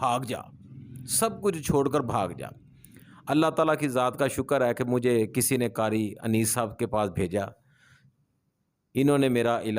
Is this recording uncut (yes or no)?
yes